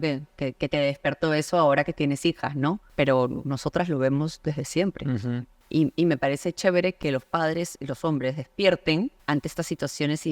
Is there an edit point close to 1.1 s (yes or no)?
no